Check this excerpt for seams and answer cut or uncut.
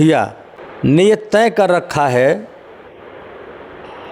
cut